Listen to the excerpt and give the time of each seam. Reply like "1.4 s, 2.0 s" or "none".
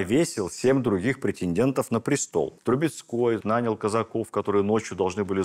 2.5 s